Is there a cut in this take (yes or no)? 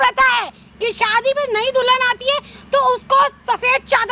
no